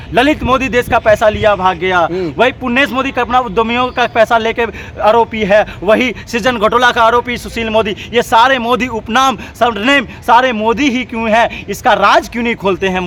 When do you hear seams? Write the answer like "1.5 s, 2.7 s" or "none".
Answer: none